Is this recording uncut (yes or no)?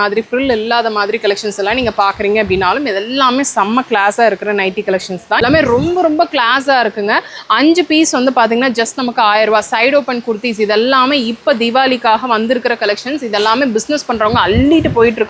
no